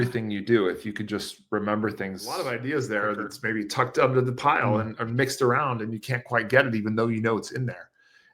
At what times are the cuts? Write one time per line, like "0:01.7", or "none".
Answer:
0:02.3